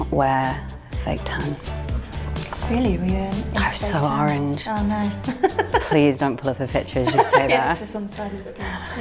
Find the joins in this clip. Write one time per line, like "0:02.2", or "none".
none